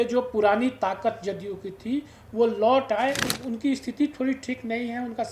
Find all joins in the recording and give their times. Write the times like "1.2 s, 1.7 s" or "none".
3.3 s